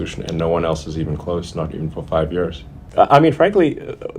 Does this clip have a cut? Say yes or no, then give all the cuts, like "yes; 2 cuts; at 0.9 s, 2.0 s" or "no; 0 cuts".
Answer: yes; 1 cut; at 2.9 s